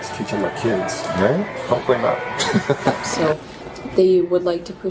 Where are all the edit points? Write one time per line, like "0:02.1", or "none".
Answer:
0:03.1